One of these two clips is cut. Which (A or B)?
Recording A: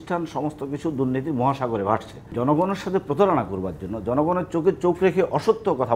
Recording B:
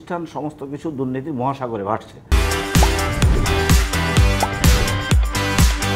A